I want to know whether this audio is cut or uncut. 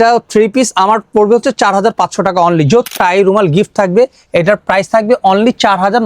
cut